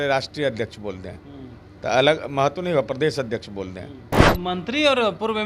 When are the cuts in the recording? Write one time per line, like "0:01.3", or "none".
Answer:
0:04.1